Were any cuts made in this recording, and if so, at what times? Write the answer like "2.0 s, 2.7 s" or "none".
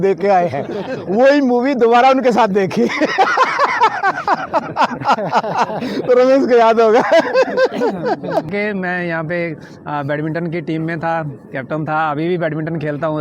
8.5 s